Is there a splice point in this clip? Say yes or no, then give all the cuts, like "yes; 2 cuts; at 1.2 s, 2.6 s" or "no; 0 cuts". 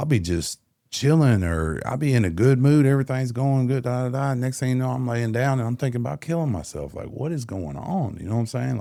no; 0 cuts